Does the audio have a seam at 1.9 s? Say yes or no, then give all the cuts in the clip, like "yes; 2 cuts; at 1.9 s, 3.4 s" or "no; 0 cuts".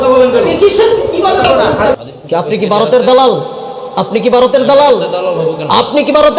yes; 1 cut; at 1.9 s